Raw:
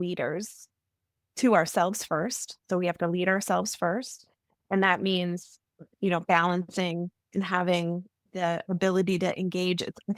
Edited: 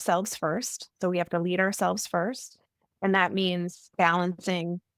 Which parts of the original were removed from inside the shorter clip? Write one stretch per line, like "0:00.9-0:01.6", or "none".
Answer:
0:05.6-0:06.2